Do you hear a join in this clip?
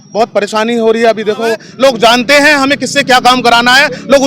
yes; 1 cut; at 1.7 s

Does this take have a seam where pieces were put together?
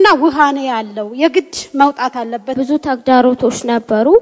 yes; 1 cut; at 2.5 s

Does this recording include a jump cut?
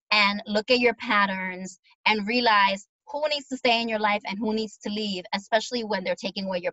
no; 0 cuts

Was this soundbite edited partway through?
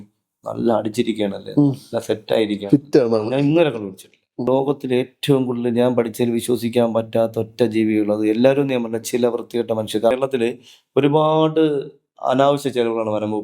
yes; 2 cuts; at 4.5 s, 10.1 s

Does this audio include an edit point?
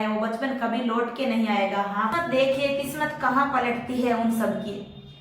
yes; 1 cut; at 2.1 s

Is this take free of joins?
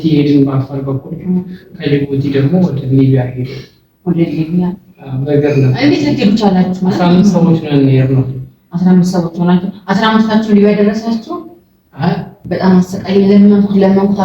no; 1 cut; at 12.4 s

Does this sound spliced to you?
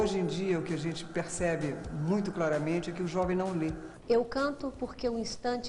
yes; 1 cut; at 3.9 s

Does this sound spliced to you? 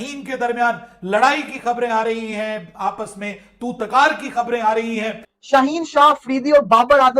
yes; 1 cut; at 5.3 s

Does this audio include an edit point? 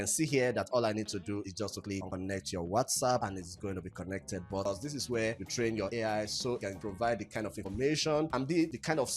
yes; 1 cut; at 4.7 s

